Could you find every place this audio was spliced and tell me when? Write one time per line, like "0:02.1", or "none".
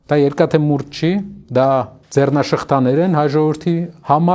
0:01.4
0:02.0